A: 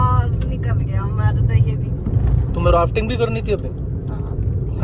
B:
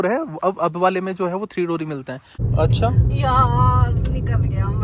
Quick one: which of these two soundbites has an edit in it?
B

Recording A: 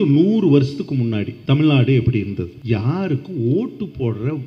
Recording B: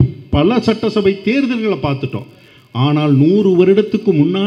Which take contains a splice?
A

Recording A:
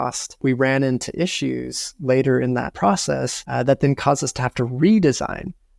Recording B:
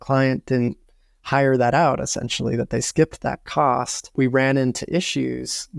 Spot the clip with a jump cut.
A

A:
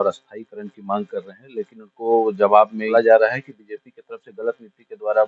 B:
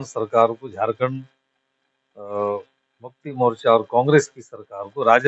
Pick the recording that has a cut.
A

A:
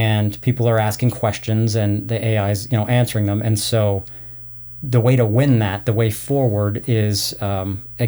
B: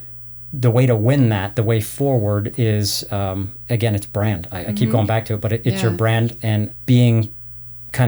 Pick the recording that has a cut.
B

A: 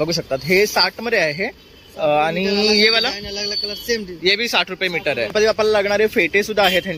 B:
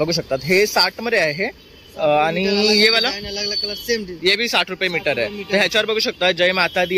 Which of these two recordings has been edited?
A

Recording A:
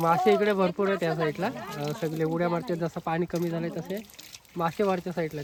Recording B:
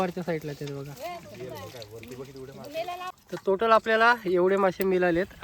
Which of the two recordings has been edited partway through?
B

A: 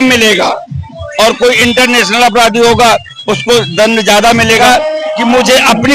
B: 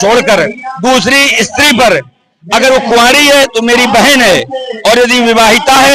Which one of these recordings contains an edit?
A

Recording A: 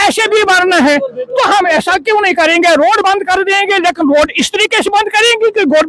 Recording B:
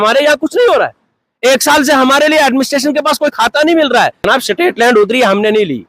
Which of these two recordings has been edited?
B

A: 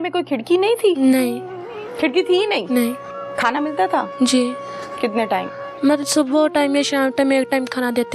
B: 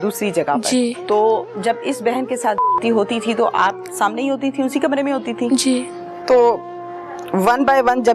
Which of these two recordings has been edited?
B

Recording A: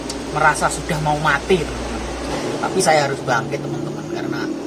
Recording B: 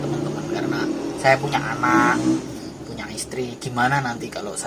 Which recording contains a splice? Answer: A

